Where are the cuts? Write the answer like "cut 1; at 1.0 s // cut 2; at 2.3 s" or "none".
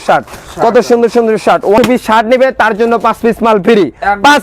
cut 1; at 1.8 s